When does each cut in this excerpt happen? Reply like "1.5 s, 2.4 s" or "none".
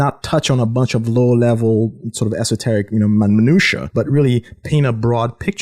3.8 s